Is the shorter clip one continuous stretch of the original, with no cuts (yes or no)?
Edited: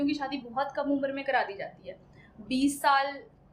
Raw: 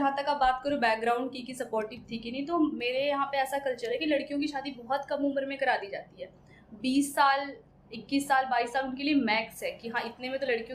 yes